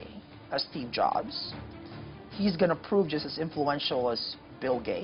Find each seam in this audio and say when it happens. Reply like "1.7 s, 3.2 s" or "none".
none